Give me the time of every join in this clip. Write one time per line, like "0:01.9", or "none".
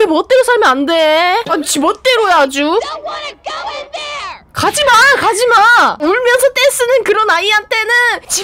0:01.4